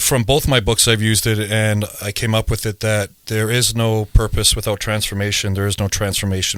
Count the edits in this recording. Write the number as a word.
zero